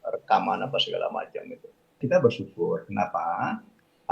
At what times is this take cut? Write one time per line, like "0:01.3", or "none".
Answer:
0:02.0